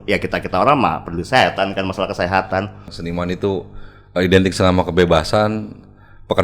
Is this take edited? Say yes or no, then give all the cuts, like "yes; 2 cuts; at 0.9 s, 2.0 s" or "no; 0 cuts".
yes; 1 cut; at 2.8 s